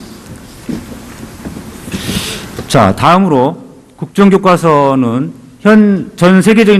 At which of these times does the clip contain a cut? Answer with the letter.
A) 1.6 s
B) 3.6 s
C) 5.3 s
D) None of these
B